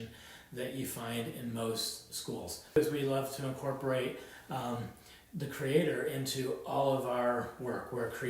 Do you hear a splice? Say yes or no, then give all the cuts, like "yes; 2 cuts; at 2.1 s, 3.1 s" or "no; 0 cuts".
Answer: yes; 1 cut; at 2.8 s